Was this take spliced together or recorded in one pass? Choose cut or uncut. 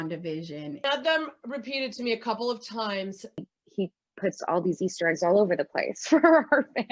cut